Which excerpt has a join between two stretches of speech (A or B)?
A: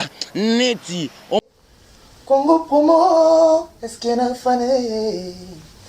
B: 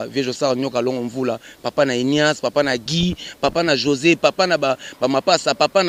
A